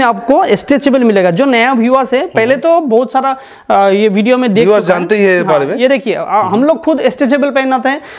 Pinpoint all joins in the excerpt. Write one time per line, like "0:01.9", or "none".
none